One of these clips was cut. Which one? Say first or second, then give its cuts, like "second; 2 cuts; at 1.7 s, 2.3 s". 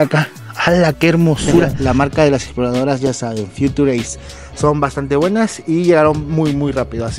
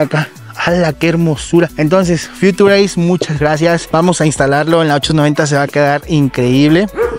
first; 1 cut; at 1.8 s